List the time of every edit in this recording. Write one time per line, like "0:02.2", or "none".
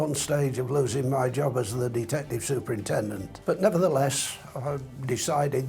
0:03.3